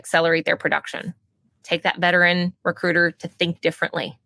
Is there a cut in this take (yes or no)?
no